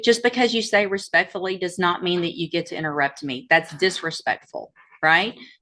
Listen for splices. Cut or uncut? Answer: uncut